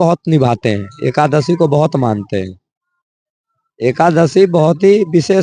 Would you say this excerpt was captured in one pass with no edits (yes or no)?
yes